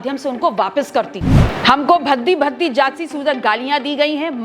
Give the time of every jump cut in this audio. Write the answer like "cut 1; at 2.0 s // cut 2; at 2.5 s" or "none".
cut 1; at 1.3 s